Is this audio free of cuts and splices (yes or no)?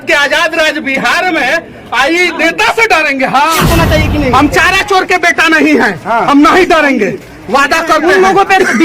no